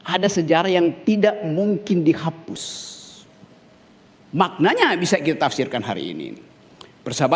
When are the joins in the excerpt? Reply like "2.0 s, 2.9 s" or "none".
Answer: 3.9 s

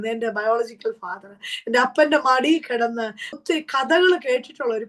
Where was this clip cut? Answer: 3.3 s

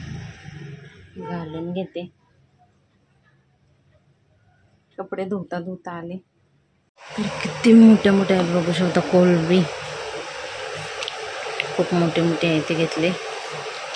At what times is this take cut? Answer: 6.9 s

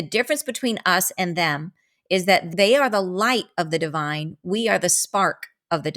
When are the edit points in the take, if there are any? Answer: 2.5 s

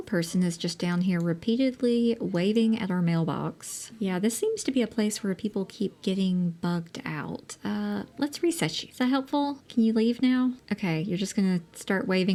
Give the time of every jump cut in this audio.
none

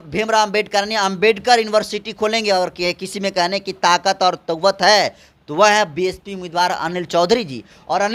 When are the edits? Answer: none

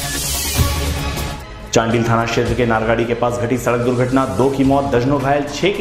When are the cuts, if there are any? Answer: none

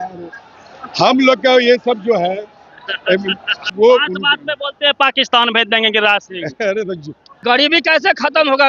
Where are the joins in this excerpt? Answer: 3.6 s, 7.2 s

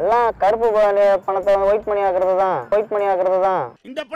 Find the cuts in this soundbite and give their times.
2.6 s

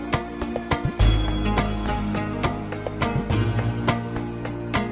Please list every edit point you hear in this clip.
none

